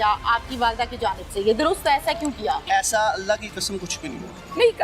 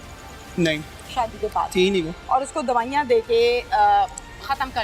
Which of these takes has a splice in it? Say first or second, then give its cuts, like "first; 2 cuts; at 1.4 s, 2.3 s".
first; 1 cut; at 2.6 s